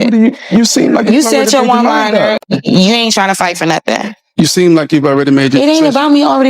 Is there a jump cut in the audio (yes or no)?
yes